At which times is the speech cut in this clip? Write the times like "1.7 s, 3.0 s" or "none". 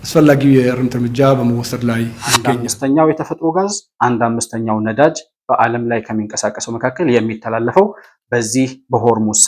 2.5 s